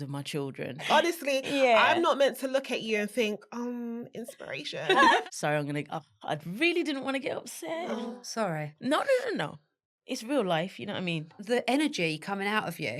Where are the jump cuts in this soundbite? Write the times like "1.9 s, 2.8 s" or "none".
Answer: 0.9 s, 5.2 s, 8.0 s, 11.4 s